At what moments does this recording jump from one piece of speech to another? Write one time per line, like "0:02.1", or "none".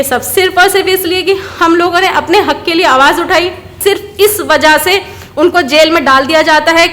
0:03.7